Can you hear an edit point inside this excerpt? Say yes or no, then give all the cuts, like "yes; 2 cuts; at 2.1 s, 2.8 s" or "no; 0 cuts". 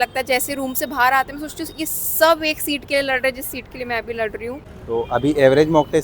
yes; 1 cut; at 4.7 s